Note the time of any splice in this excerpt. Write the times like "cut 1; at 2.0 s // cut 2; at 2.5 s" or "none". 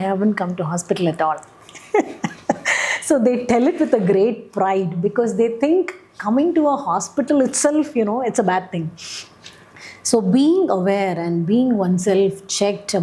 none